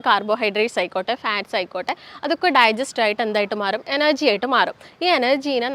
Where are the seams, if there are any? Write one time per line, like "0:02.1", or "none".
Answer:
none